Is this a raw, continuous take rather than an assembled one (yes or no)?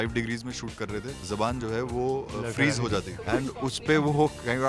no